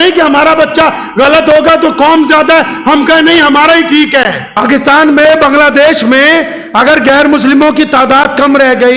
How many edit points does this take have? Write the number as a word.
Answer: one